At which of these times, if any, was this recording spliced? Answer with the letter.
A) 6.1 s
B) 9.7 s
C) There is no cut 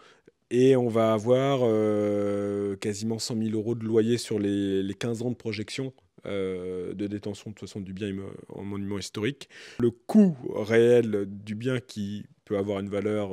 B